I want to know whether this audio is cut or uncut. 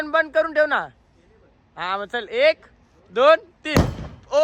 uncut